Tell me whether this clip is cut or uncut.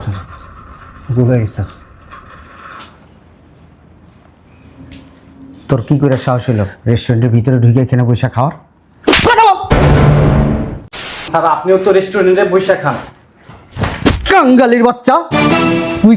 cut